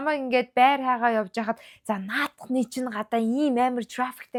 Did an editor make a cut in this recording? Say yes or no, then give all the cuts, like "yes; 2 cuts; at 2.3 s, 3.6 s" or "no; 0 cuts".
no; 0 cuts